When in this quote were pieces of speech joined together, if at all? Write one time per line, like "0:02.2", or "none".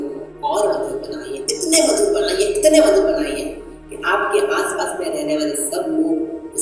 none